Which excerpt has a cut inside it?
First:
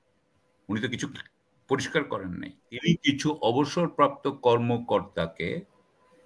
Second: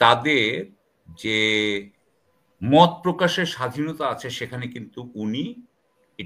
first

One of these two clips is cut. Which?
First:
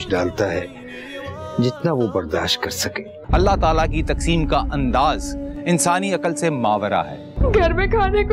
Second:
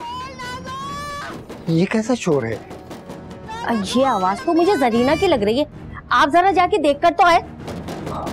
first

